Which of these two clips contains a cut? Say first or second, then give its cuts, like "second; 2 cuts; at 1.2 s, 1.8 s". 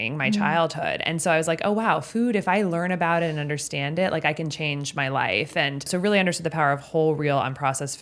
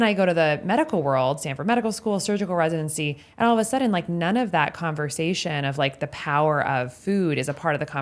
first; 1 cut; at 5.9 s